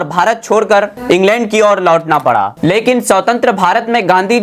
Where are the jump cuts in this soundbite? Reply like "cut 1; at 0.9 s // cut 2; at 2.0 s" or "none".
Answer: cut 1; at 2.6 s